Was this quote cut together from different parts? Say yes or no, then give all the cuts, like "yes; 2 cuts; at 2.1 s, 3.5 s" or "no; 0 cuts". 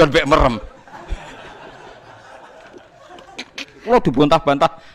yes; 1 cut; at 3.8 s